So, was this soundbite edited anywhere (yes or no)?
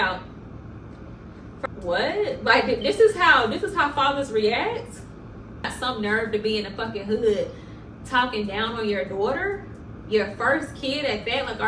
yes